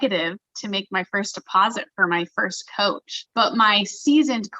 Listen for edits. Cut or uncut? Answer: cut